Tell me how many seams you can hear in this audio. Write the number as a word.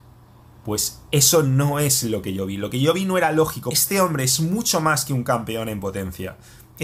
one